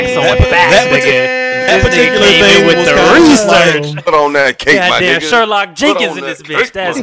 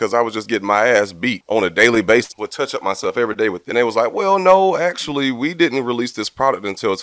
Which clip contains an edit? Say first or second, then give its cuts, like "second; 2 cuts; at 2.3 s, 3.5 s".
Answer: second; 3 cuts; at 1.4 s, 2.4 s, 3.6 s